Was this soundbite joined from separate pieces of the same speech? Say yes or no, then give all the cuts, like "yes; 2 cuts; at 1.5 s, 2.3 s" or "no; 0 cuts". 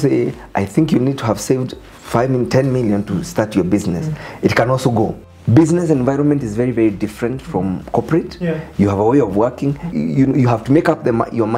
yes; 2 cuts; at 5.3 s, 9.9 s